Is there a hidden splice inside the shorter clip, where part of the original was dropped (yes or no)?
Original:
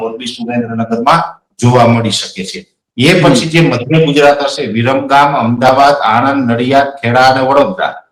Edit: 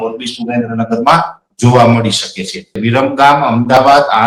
yes